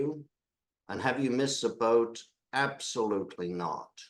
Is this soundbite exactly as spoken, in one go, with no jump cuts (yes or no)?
yes